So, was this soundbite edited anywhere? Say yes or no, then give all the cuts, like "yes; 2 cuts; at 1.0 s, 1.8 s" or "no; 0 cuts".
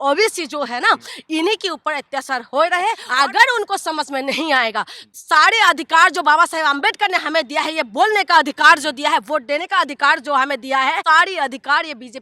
yes; 3 cuts; at 3.0 s, 5.0 s, 11.0 s